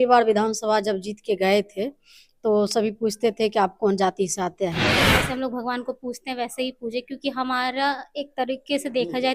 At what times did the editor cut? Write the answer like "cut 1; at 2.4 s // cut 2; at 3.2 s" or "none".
cut 1; at 5.1 s